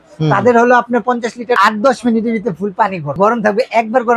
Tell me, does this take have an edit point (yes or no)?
yes